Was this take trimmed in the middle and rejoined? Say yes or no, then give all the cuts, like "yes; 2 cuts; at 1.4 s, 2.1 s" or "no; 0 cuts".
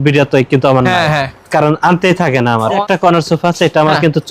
yes; 1 cut; at 2.8 s